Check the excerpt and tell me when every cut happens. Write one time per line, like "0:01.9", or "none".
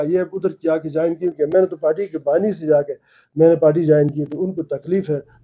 none